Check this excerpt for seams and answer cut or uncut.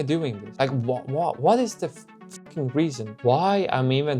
cut